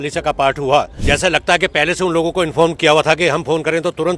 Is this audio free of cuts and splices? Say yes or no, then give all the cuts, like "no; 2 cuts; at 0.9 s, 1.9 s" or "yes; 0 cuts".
no; 1 cut; at 1.0 s